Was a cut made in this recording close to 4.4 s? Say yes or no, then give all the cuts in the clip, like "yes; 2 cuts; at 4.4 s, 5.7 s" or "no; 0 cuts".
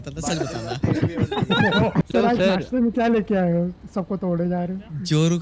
no; 1 cut; at 2.1 s